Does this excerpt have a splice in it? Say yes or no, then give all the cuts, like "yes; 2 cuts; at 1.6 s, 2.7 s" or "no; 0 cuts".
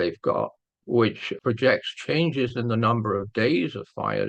yes; 1 cut; at 1.3 s